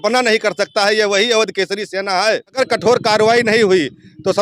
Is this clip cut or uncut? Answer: cut